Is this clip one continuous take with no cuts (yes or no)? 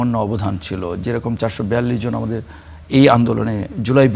yes